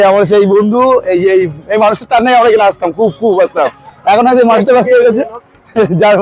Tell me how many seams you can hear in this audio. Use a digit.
0